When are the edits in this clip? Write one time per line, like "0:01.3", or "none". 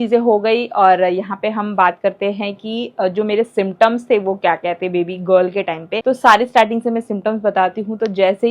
0:05.9